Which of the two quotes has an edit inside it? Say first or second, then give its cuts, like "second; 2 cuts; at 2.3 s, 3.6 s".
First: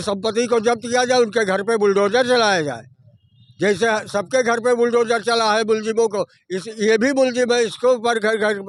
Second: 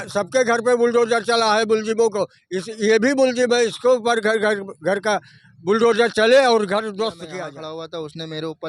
second; 1 cut; at 7.2 s